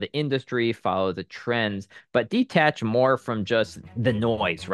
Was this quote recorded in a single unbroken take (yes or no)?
no